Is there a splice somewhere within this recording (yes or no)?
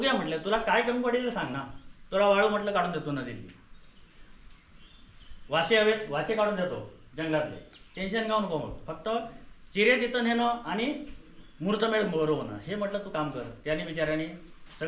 no